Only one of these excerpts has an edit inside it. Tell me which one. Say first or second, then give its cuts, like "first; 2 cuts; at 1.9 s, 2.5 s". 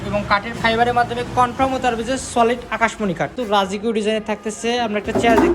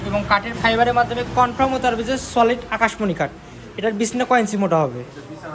first; 1 cut; at 3.4 s